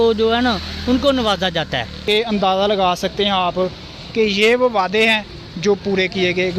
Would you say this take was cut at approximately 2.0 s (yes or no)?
yes